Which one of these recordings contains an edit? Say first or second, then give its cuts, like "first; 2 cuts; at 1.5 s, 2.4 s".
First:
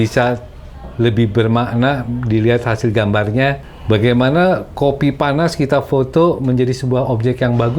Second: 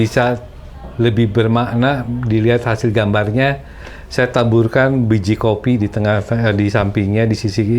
first; 1 cut; at 3.7 s